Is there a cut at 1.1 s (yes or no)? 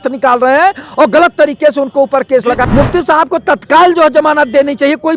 no